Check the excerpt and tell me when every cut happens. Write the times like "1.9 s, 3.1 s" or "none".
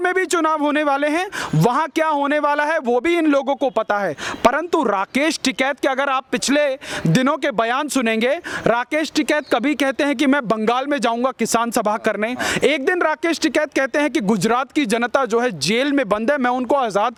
none